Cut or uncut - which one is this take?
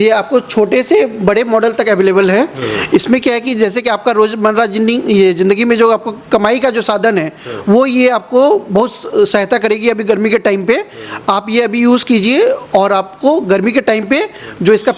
uncut